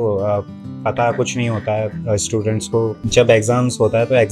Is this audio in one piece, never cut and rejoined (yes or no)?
no